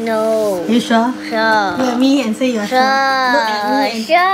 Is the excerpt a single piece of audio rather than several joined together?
yes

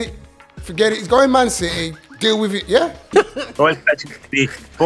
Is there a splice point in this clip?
yes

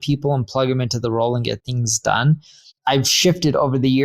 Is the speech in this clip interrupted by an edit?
yes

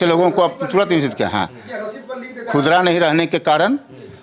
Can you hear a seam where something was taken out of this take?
no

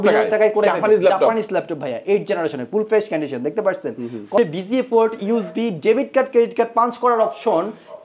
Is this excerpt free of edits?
no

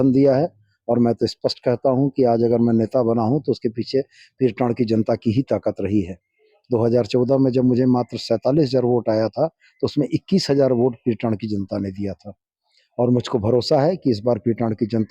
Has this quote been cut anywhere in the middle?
no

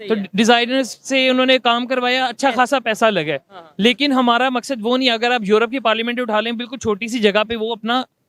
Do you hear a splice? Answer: no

